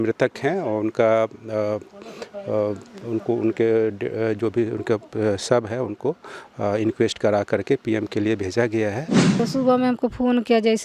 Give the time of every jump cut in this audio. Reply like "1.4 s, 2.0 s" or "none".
9.4 s